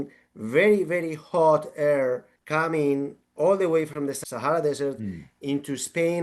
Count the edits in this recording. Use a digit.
1